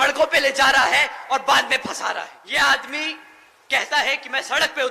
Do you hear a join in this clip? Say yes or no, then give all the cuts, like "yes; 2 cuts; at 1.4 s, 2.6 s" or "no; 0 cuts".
yes; 1 cut; at 2.4 s